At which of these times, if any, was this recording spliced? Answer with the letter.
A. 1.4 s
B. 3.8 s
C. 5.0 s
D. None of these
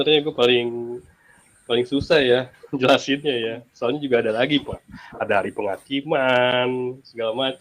D